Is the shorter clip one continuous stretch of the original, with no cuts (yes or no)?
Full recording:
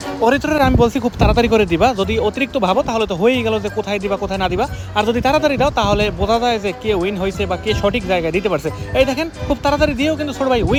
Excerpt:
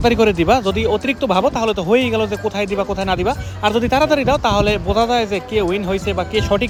yes